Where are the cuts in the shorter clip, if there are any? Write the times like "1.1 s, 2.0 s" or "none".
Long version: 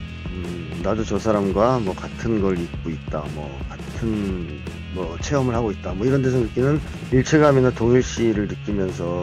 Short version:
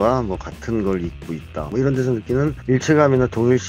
1.7 s, 2.6 s

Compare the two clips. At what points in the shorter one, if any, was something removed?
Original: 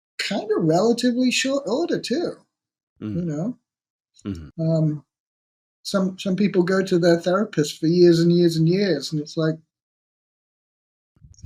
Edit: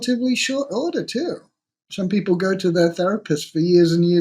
1.9 s

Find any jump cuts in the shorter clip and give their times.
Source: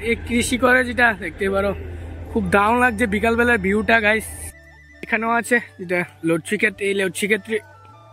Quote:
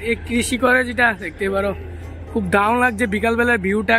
none

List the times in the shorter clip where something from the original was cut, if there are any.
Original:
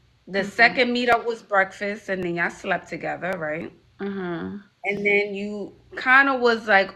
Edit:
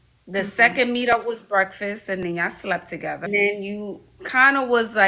3.3 s

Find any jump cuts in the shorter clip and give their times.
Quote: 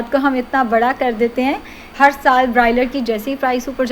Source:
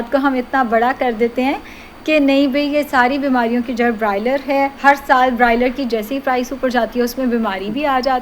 1.9 s

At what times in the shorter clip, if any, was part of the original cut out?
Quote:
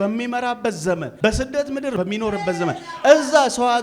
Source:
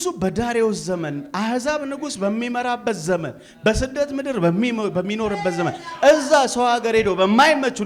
1.1 s, 2.0 s

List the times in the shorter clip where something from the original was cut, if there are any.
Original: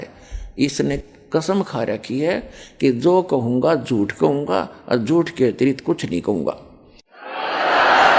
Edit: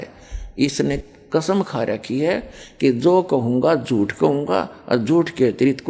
none

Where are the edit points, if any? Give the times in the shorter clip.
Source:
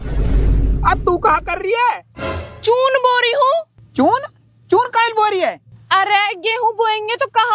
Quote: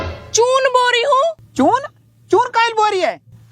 1.4 s

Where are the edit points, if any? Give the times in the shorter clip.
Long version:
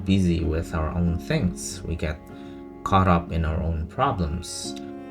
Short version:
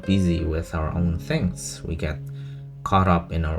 none

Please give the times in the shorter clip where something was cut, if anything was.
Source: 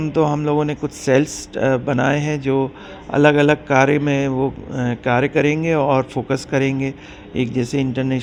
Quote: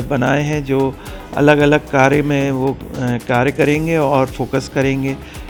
none

